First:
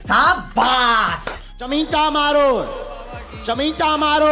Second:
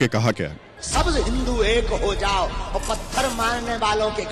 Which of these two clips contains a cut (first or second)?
first